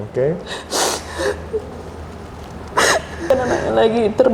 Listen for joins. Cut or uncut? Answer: cut